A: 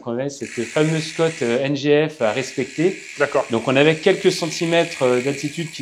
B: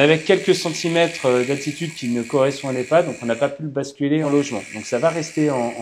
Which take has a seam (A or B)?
B